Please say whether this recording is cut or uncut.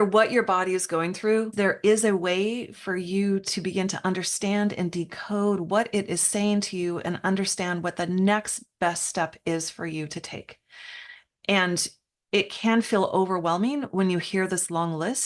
cut